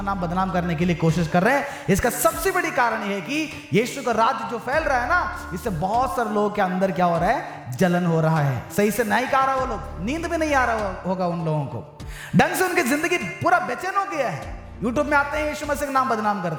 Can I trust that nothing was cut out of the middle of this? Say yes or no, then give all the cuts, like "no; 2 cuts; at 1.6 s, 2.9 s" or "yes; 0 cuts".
yes; 0 cuts